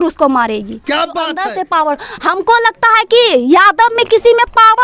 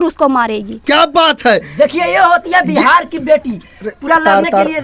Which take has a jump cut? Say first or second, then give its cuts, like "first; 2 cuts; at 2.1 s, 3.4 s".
first; 1 cut; at 1.4 s